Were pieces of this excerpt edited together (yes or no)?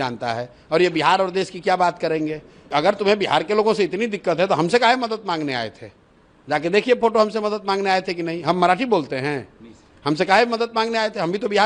yes